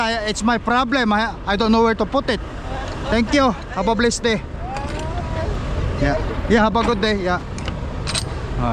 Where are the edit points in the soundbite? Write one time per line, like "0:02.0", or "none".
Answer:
none